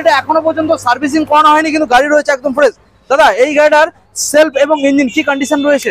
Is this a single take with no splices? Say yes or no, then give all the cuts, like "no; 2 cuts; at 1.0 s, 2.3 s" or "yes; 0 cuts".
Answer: yes; 0 cuts